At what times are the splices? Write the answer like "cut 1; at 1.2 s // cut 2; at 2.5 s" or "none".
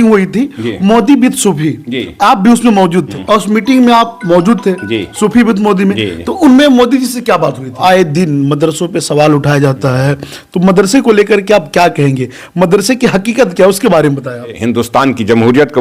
cut 1; at 3.1 s // cut 2; at 7.8 s // cut 3; at 14.6 s